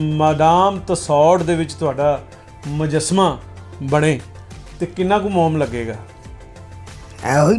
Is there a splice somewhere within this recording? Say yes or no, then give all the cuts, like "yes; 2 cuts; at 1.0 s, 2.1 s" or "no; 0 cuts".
no; 0 cuts